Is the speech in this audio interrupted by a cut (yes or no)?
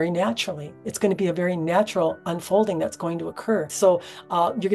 yes